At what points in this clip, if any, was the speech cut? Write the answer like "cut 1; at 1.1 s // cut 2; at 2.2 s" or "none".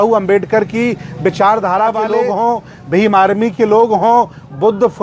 cut 1; at 2.3 s

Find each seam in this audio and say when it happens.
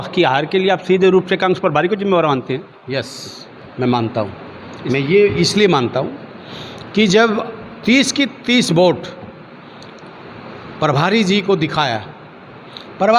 none

